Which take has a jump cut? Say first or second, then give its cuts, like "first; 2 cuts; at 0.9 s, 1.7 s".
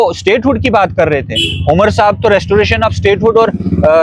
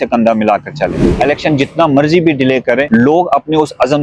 second; 2 cuts; at 1.1 s, 2.8 s